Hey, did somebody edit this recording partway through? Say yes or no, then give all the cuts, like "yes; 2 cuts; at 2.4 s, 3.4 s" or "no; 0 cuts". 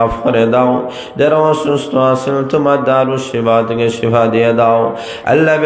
no; 0 cuts